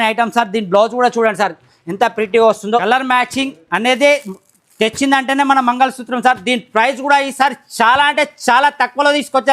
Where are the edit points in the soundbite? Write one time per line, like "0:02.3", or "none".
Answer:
0:02.6